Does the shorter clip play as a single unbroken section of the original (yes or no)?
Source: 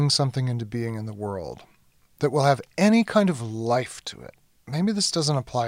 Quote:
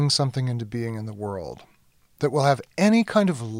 yes